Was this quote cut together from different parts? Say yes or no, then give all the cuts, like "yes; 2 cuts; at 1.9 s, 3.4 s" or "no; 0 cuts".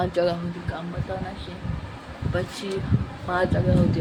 no; 0 cuts